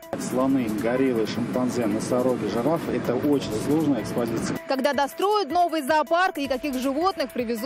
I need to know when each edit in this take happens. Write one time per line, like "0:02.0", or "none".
none